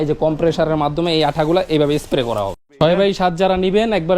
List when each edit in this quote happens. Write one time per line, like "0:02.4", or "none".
0:02.8

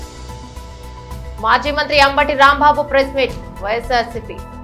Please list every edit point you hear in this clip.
0:01.0

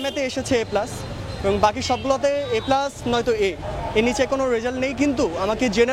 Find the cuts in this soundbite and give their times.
none

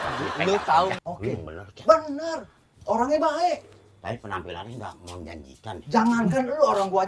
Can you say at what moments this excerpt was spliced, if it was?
0:01.0

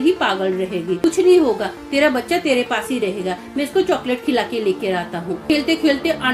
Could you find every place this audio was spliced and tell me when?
0:01.0
0:05.4

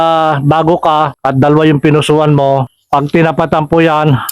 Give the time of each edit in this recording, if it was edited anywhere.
0:01.2
0:02.8

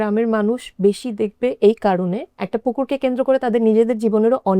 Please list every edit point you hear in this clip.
0:02.4

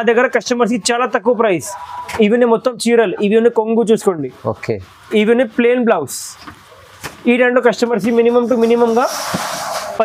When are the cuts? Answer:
none

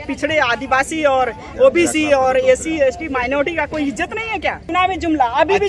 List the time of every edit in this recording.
0:04.6

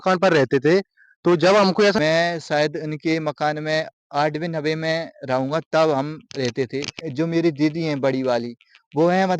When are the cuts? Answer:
0:02.0
0:07.0

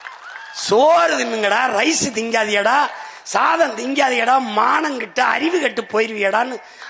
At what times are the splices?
none

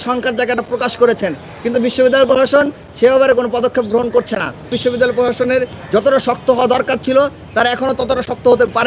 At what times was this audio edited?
0:04.8

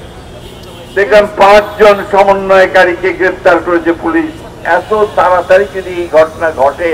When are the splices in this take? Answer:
0:04.6

